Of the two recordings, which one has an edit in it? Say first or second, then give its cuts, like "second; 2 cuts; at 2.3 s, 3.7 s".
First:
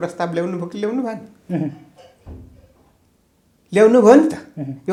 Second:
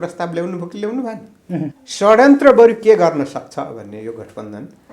second; 1 cut; at 1.8 s